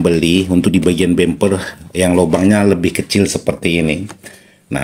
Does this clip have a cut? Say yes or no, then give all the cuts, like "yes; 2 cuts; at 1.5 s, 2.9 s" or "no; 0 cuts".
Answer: no; 0 cuts